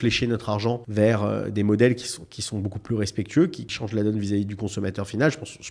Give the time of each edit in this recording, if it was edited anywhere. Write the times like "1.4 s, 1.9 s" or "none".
0.8 s, 3.7 s

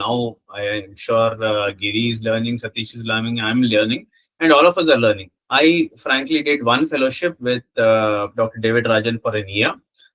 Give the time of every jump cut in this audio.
5.3 s

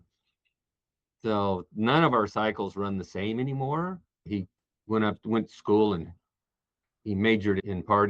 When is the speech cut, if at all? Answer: 4.2 s

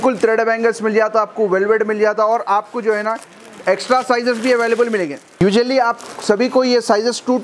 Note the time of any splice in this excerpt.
none

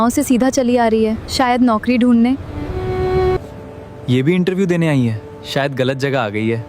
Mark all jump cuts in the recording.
3.6 s

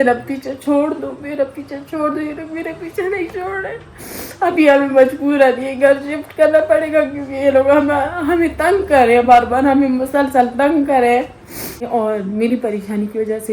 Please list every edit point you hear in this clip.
11.8 s

